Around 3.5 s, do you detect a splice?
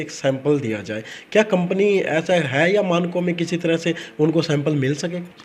no; 0 cuts

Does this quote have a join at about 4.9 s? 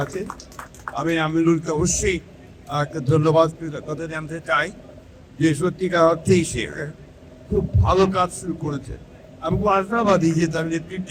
no; 0 cuts

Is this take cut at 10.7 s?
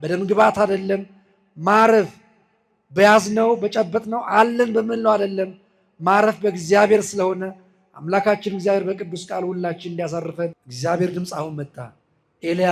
yes; 1 cut; at 10.7 s

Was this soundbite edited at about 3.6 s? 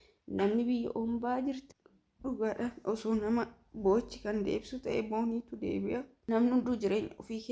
no; 2 cuts; at 1.6 s, 6.1 s

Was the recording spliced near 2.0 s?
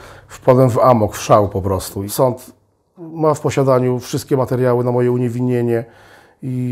yes; 1 cut; at 2.0 s

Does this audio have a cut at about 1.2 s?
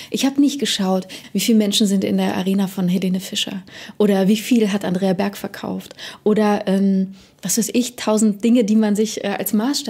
yes; 1 cut; at 1.2 s

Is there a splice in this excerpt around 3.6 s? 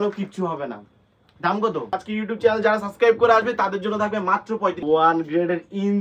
no; 2 cuts; at 2.0 s, 4.8 s

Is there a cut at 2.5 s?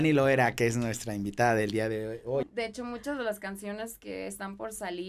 yes; 1 cut; at 2.5 s

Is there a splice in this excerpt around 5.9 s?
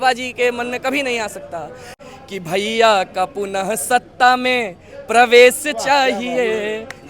no; 1 cut; at 1.9 s

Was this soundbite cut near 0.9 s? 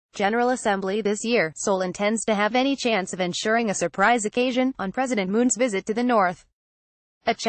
yes; 1 cut; at 0.9 s

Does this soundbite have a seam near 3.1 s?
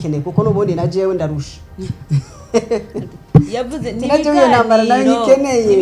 no; 0 cuts

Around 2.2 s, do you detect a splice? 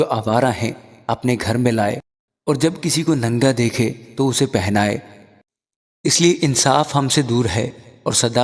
no; 1 cut; at 5.4 s

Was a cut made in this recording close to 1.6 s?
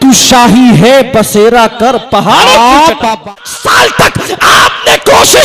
no; 1 cut; at 3.2 s

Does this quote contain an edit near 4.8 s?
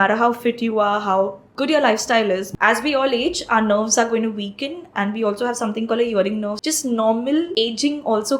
no; 4 cuts; at 1.4 s, 2.5 s, 6.6 s, 7.5 s

